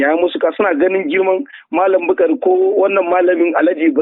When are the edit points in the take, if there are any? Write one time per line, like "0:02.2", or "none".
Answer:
none